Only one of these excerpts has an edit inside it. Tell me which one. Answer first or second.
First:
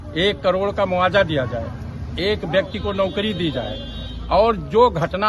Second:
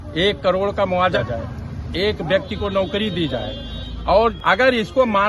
second